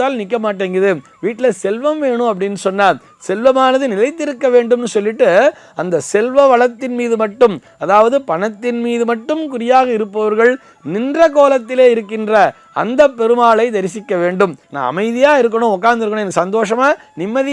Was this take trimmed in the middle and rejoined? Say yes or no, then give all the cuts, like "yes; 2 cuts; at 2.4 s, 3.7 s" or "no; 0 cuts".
yes; 1 cut; at 14.7 s